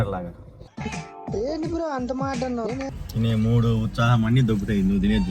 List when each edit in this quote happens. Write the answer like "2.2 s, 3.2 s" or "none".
3.0 s